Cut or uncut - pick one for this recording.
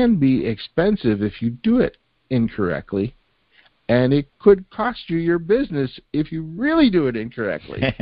uncut